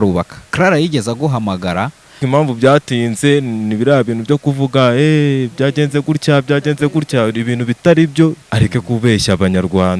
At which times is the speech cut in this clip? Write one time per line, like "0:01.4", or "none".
0:02.2
0:08.4